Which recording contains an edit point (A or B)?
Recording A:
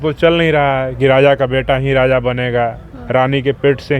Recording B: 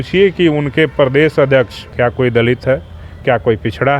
B